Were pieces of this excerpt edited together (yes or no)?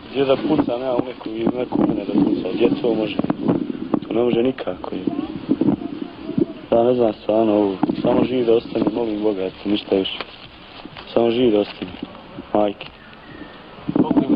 no